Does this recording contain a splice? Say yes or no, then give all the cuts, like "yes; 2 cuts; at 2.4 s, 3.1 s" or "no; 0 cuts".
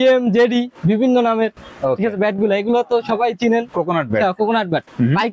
no; 0 cuts